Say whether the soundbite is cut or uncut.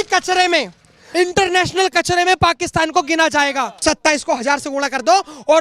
cut